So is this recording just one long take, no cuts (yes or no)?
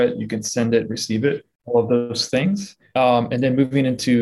no